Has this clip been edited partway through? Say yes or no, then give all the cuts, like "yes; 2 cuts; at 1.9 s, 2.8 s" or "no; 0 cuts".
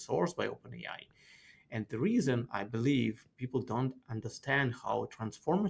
no; 0 cuts